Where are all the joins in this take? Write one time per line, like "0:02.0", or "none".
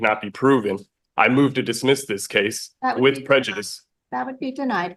none